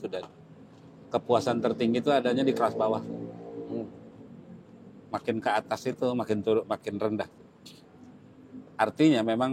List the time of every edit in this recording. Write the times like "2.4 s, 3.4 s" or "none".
none